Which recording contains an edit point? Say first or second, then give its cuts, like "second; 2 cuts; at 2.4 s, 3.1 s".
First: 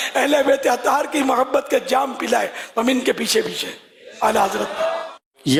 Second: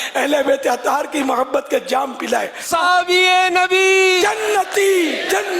second; 1 cut; at 2.6 s